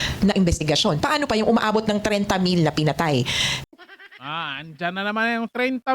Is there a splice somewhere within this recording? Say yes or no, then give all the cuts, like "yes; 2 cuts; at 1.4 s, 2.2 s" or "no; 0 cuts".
no; 0 cuts